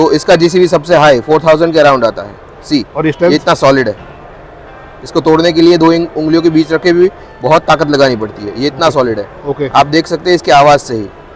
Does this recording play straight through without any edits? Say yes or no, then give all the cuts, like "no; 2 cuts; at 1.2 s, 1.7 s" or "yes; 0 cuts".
yes; 0 cuts